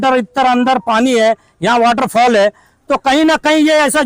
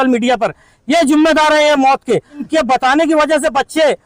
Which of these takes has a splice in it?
second; 1 cut; at 2.5 s

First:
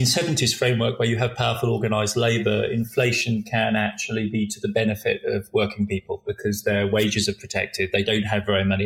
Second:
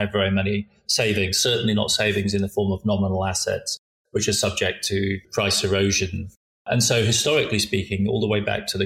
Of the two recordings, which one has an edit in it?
second; 2 cuts; at 5.3 s, 6.6 s

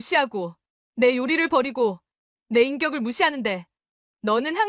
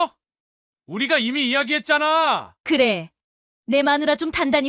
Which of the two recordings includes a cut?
second; 1 cut; at 2.5 s

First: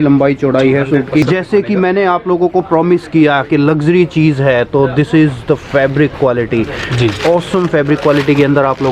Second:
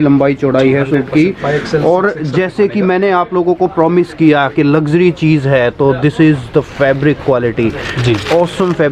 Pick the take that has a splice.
first; 1 cut; at 1.2 s

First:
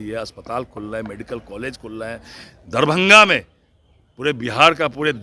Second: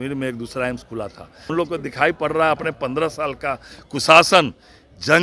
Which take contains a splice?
second; 1 cut; at 1.5 s

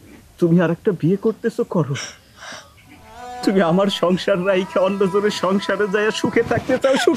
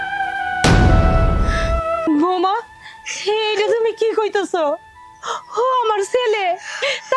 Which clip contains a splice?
second; 1 cut; at 2.1 s

